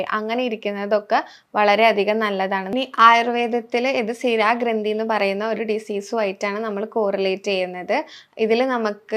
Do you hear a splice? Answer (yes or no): yes